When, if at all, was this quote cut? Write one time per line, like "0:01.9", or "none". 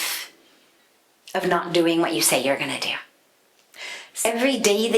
0:04.0